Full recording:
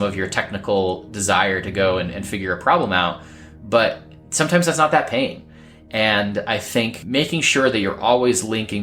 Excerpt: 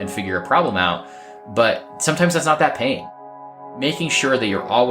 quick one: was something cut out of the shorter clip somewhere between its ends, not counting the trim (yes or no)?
yes